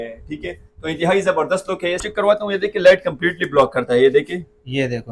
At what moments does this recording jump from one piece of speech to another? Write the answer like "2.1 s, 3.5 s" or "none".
2.0 s